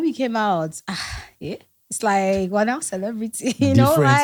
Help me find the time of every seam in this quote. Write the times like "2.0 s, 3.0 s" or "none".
none